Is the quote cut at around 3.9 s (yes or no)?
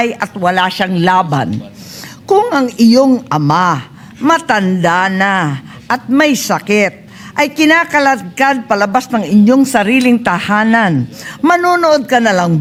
no